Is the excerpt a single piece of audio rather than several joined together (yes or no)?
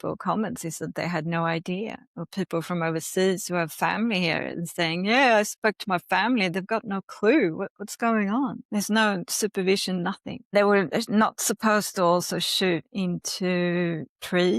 no